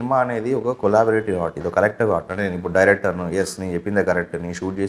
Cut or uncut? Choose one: uncut